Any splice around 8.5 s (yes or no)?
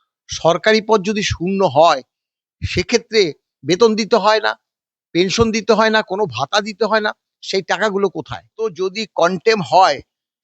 yes